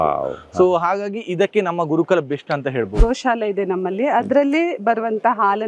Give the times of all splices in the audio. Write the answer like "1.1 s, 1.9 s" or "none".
3.0 s